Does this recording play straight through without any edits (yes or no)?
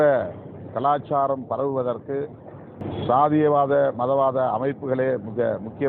no